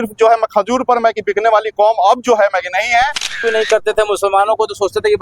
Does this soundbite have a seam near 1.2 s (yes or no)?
no